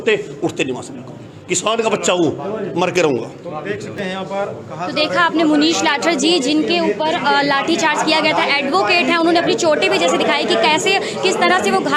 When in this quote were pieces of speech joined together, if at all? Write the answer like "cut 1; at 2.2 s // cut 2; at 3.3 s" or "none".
none